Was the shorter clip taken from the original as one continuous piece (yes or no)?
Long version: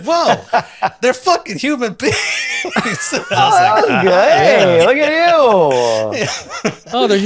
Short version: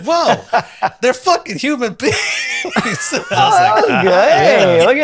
yes